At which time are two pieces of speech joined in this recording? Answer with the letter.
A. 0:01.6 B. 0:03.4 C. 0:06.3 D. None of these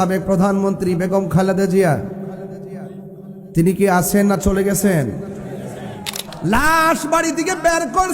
C